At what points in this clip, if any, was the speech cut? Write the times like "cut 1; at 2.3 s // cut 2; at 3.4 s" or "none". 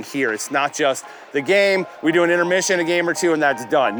none